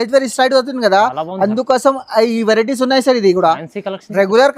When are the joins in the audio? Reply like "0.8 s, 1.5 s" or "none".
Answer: none